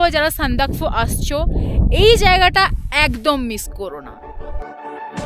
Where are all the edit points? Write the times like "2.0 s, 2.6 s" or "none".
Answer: none